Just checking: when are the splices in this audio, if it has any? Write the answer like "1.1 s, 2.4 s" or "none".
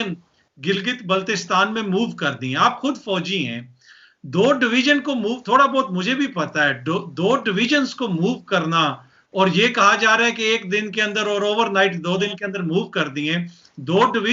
none